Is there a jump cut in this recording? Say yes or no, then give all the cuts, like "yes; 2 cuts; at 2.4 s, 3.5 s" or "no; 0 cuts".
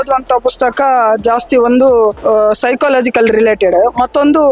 yes; 1 cut; at 2.2 s